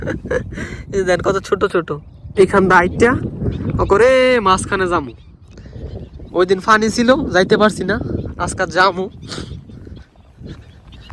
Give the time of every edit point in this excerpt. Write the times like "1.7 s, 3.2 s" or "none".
2.2 s